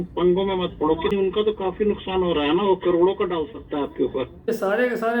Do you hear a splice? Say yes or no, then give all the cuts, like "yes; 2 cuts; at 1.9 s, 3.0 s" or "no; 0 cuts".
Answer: yes; 2 cuts; at 1.1 s, 4.5 s